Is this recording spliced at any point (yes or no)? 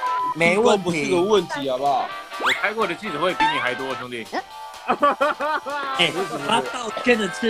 yes